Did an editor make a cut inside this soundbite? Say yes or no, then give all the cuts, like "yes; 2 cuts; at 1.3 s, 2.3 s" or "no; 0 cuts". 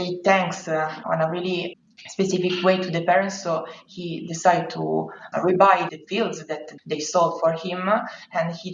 no; 0 cuts